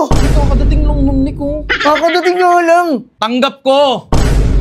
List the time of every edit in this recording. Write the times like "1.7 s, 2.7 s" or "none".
3.1 s